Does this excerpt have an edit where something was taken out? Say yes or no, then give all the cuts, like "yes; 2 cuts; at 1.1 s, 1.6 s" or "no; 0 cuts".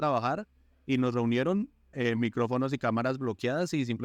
yes; 1 cut; at 1.8 s